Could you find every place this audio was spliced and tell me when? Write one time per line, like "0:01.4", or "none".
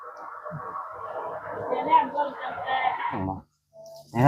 0:03.2